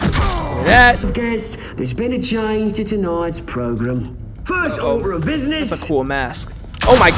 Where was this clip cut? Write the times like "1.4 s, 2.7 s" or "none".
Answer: 1.0 s